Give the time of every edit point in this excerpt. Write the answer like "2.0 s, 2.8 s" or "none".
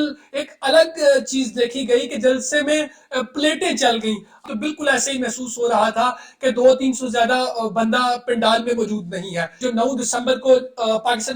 4.4 s, 9.6 s